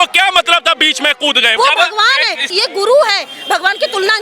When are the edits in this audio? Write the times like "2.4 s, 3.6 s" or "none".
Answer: 1.6 s, 2.5 s